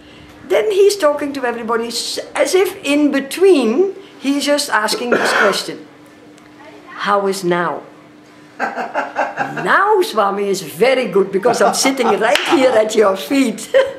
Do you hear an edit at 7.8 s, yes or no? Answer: no